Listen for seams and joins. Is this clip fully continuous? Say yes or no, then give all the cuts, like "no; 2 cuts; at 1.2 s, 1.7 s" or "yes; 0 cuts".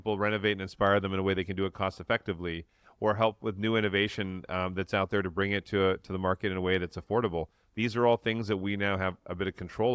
yes; 0 cuts